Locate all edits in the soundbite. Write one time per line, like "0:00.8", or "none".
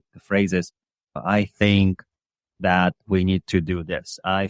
0:01.1